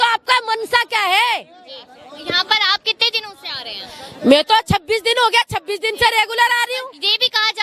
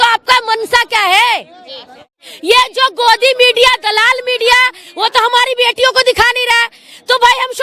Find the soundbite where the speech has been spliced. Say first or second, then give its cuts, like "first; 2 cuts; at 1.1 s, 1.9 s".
second; 1 cut; at 2.2 s